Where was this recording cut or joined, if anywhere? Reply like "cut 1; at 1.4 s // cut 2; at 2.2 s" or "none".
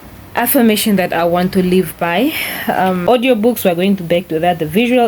cut 1; at 3.0 s